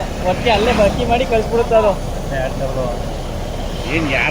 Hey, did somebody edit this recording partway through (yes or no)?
no